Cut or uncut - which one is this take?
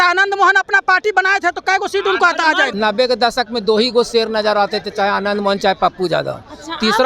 cut